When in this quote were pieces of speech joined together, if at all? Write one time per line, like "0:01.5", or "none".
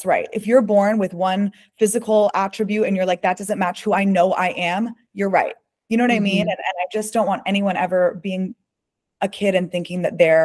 none